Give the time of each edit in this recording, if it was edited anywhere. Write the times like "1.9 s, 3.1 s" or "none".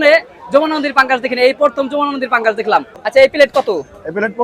3.0 s